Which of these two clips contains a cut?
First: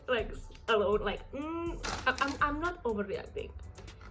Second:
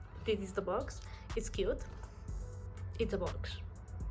first; 1 cut; at 1.8 s

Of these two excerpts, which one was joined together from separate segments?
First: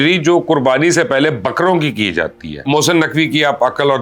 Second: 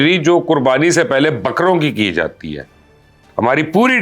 first; 1 cut; at 2.6 s

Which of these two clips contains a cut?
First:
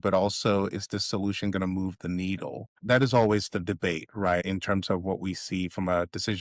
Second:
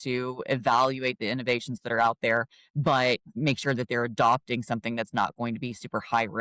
first; 2 cuts; at 2.8 s, 4.4 s

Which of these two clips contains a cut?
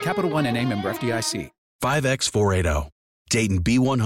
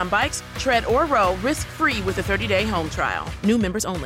first; 1 cut; at 1.6 s

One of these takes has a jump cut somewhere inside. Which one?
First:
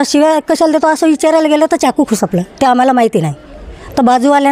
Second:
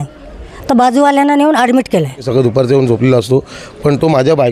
second; 1 cut; at 2.3 s

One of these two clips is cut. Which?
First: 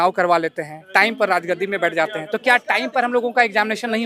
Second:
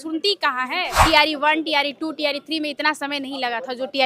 second; 1 cut; at 1.0 s

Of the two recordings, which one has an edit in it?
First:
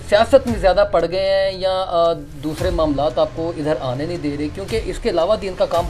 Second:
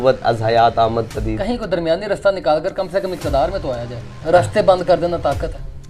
second; 1 cut; at 4.2 s

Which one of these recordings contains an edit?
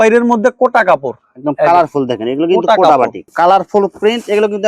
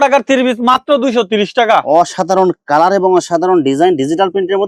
first; 1 cut; at 3.3 s

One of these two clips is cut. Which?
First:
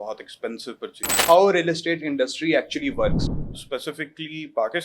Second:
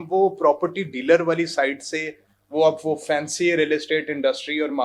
first; 2 cuts; at 1.2 s, 3.3 s

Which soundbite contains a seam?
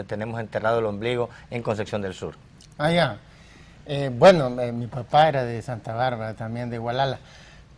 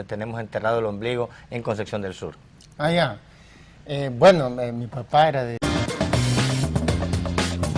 first; 1 cut; at 5.6 s

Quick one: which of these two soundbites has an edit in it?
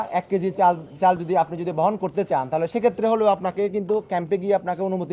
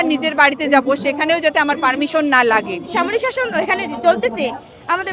second; 1 cut; at 2.9 s

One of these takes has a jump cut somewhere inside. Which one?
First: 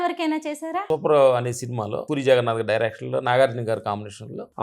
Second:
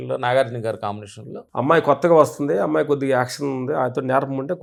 first; 2 cuts; at 0.8 s, 2.0 s

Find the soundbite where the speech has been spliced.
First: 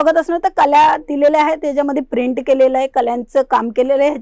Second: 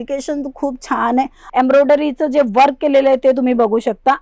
second; 1 cut; at 1.4 s

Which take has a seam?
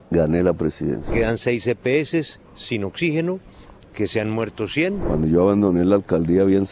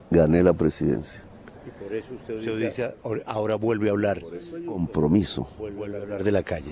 first; 2 cuts; at 1.1 s, 5.0 s

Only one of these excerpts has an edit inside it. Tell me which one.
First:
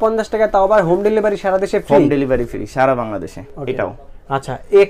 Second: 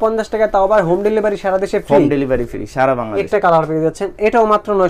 second; 1 cut; at 3.3 s

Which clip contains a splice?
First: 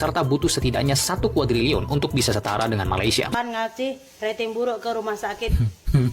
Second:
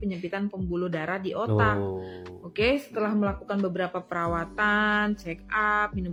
first; 1 cut; at 3.3 s

